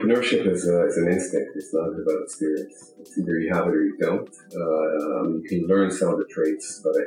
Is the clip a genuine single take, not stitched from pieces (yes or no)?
yes